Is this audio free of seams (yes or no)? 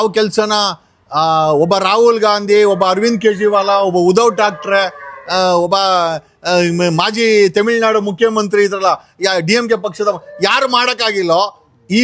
yes